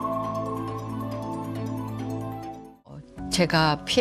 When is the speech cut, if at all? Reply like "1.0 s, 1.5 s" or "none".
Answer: 3.0 s